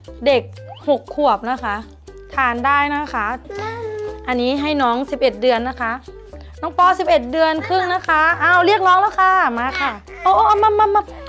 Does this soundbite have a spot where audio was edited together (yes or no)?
yes